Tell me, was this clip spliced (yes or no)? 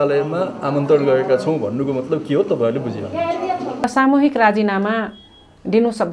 yes